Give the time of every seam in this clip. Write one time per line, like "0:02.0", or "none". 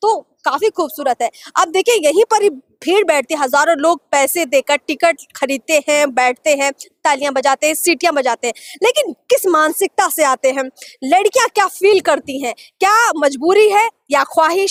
none